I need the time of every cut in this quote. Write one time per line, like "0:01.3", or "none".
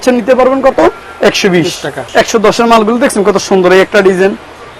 0:02.1